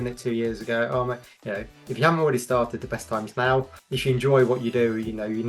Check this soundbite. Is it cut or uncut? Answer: cut